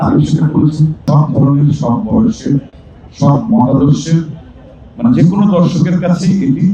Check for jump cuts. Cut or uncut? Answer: cut